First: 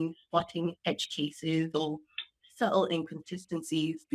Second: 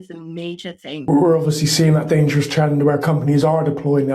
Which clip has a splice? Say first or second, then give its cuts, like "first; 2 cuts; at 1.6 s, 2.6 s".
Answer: second; 1 cut; at 1.1 s